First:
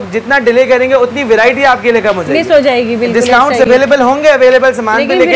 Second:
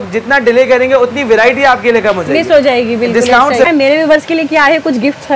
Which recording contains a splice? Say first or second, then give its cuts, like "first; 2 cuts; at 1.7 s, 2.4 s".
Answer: second; 1 cut; at 3.7 s